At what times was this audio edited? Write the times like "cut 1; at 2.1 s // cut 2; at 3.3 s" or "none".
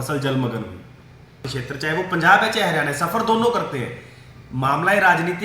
cut 1; at 1.4 s